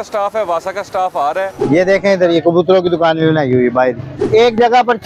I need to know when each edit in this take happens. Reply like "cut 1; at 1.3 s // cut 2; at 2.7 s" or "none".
cut 1; at 1.6 s // cut 2; at 4.1 s